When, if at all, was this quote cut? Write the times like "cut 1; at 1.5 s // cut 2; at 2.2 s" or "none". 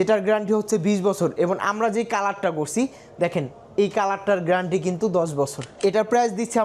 cut 1; at 5.6 s